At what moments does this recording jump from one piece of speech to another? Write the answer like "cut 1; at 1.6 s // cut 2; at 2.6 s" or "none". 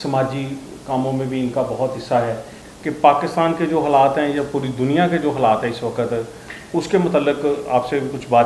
cut 1; at 2.5 s

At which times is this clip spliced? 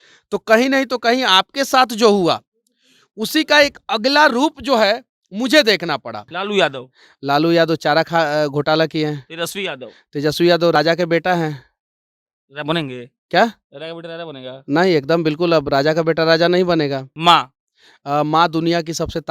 cut 1; at 6.3 s // cut 2; at 17.1 s

